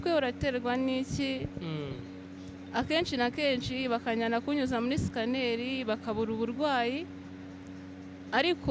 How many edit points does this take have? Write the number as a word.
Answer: zero